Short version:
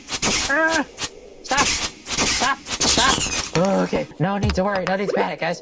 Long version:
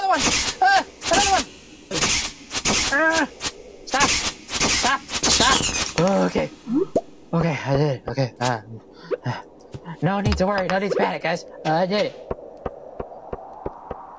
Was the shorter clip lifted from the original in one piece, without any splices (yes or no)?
no